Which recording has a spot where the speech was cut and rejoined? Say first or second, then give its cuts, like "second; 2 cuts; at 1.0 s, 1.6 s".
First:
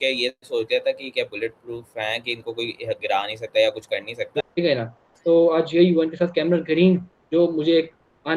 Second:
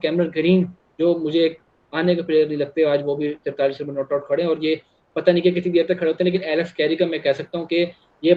first; 1 cut; at 4.4 s